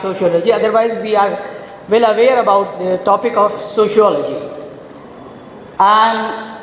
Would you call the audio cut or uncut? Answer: uncut